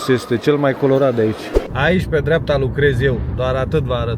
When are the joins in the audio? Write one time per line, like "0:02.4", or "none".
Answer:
0:01.6